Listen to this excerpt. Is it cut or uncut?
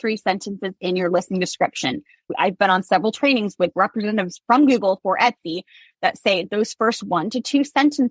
cut